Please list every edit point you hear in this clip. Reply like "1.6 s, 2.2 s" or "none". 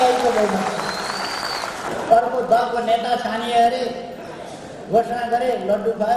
1.9 s